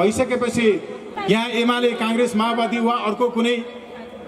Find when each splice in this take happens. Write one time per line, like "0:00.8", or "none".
0:01.0